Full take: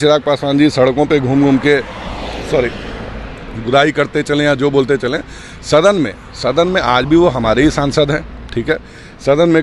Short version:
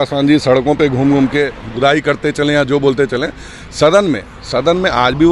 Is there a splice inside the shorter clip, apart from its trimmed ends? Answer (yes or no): yes